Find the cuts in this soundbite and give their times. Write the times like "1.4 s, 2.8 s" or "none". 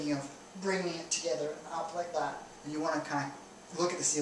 none